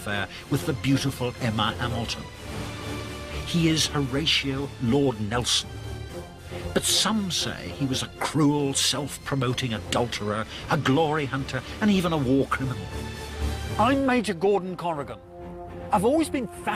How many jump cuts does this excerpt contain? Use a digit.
1